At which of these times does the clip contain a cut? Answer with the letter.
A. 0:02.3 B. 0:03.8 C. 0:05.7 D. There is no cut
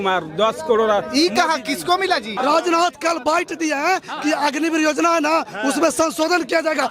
A